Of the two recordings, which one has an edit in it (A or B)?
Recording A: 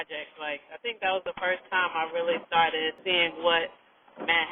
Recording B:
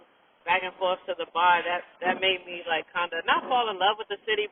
A